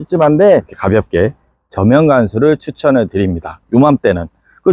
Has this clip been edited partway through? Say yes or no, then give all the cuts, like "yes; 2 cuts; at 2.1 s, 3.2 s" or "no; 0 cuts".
no; 0 cuts